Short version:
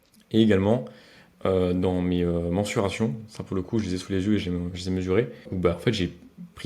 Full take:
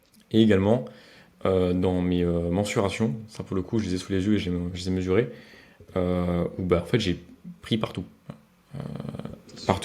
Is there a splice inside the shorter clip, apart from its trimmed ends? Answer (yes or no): yes